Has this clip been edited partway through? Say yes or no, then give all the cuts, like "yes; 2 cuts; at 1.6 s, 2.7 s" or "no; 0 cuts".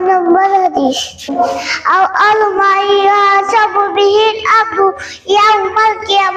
no; 0 cuts